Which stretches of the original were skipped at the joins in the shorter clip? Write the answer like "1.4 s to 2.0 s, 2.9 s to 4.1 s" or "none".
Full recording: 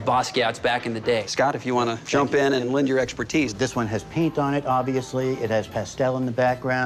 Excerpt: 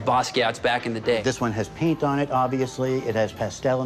1.2 s to 3.6 s